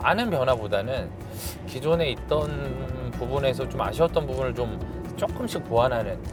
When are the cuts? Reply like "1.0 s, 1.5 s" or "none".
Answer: none